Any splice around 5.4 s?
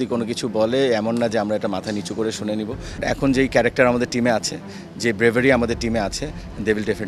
no; 1 cut; at 3.0 s

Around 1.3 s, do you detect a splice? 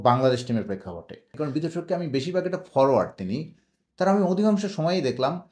yes; 1 cut; at 1.3 s

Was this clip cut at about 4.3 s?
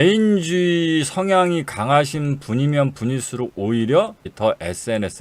yes; 1 cut; at 4.3 s

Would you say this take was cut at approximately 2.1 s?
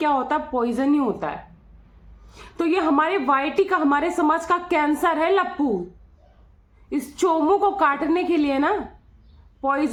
no; 0 cuts

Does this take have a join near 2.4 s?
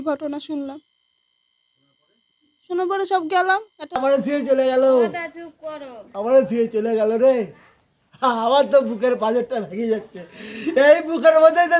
no; 1 cut; at 3.8 s

